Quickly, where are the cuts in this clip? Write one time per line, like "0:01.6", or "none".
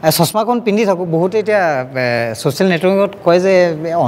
none